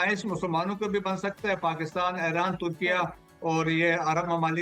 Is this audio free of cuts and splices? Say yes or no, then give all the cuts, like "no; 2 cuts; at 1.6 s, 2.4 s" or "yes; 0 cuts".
yes; 0 cuts